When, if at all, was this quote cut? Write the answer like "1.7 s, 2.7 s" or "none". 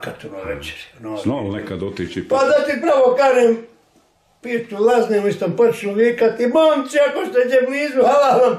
none